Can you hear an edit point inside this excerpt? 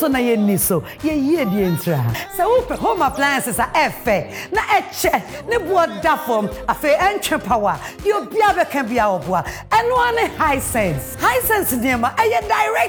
no; 0 cuts

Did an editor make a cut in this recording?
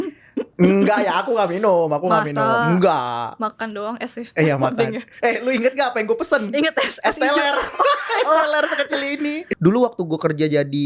yes; 1 cut; at 9.5 s

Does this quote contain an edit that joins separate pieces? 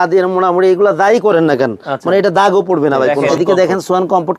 yes; 1 cut; at 3.3 s

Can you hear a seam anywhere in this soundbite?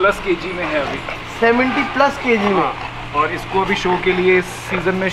no; 0 cuts

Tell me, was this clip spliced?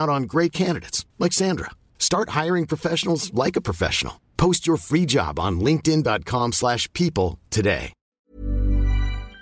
yes; 1 cut; at 8.2 s

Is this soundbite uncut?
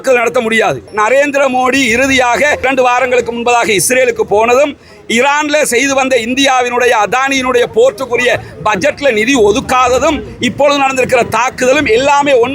no; 2 cuts; at 0.9 s, 2.7 s

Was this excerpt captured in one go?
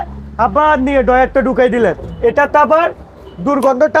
no; 1 cut; at 2.1 s

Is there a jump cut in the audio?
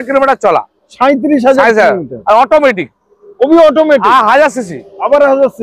no; 0 cuts

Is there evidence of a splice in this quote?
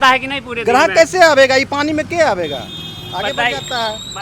no; 0 cuts

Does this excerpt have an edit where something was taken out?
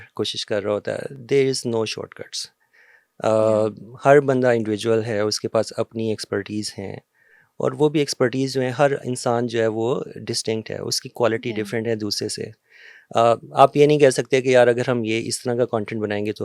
no; 0 cuts

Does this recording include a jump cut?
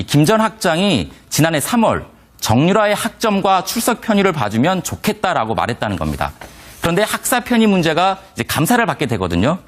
yes; 1 cut; at 3.9 s

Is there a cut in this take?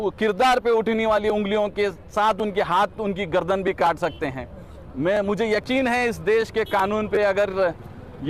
no; 0 cuts

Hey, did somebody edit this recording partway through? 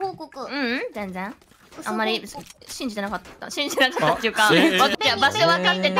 yes; 1 cut; at 4.9 s

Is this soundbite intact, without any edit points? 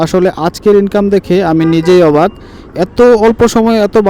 yes; 0 cuts

